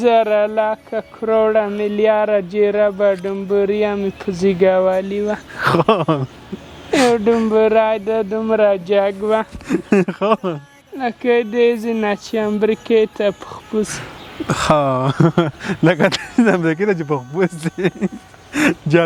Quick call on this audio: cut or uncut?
uncut